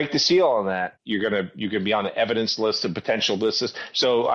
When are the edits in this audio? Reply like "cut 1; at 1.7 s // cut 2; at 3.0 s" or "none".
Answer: cut 1; at 1.0 s